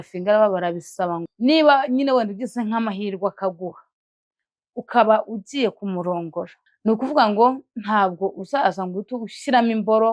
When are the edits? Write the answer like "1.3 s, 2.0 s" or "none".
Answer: 1.3 s, 6.6 s